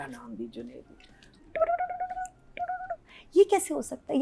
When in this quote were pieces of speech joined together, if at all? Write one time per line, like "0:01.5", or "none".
0:01.4